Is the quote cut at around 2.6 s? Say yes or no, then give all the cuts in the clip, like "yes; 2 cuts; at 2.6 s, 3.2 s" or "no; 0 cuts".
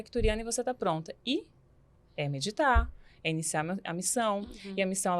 no; 0 cuts